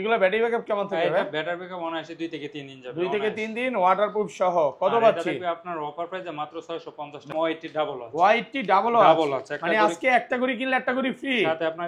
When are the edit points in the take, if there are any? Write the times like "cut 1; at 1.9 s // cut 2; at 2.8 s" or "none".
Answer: cut 1; at 7.3 s